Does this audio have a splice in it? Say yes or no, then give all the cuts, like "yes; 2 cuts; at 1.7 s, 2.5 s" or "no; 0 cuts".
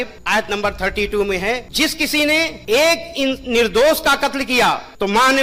no; 0 cuts